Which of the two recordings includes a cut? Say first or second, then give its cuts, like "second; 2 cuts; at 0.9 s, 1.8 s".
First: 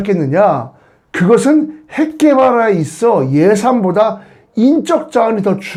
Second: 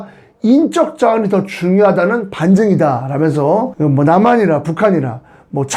second; 1 cut; at 3.7 s